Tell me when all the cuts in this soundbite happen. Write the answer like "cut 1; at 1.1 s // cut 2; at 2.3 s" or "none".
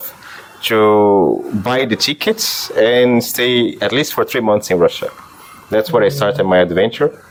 none